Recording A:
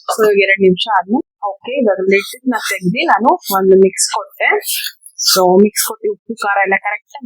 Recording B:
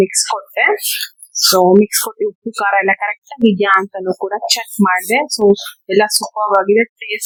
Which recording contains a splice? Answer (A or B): A